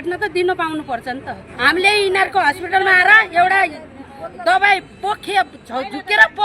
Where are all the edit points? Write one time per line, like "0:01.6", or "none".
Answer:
0:01.5